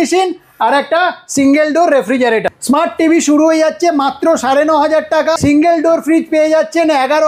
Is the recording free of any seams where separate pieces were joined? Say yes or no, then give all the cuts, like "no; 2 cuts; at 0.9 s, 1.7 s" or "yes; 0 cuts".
no; 2 cuts; at 2.5 s, 5.4 s